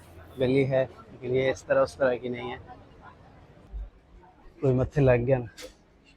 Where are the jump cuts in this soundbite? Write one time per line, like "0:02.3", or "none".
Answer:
0:03.7